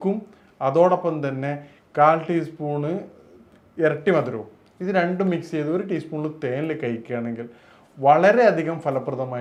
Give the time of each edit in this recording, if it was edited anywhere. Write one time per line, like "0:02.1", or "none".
none